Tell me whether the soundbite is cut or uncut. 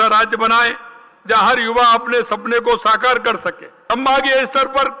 cut